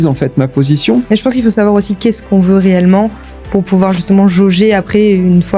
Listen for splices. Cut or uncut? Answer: cut